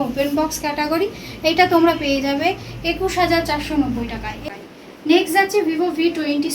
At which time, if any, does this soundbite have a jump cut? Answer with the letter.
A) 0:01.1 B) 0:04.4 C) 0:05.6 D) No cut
B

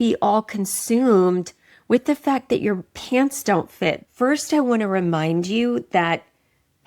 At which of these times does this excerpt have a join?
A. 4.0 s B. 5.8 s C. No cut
A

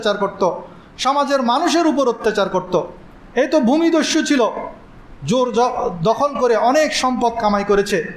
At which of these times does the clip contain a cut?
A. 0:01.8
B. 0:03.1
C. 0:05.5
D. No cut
D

